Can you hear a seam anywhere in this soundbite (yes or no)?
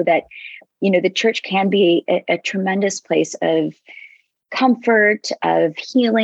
no